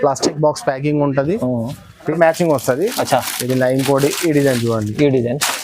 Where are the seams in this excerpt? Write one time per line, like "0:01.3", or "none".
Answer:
0:02.1